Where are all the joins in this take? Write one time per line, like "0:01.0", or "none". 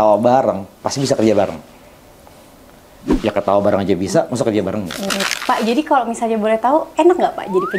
0:05.3